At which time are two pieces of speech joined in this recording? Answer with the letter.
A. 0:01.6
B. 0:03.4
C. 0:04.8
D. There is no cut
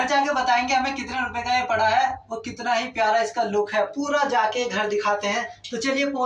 D